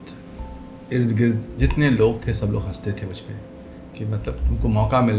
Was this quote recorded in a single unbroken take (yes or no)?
yes